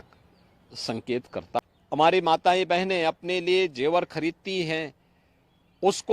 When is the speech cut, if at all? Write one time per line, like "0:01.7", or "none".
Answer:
0:01.6